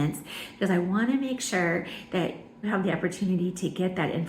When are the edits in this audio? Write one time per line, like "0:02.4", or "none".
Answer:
0:02.6